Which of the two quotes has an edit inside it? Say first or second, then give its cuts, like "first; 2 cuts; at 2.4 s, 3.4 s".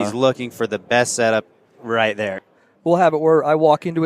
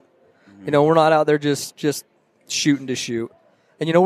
first; 1 cut; at 2.4 s